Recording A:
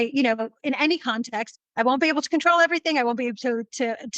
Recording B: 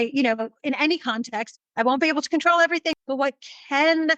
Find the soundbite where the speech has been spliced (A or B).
B